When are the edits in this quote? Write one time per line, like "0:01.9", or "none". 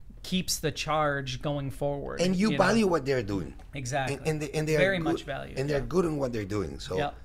none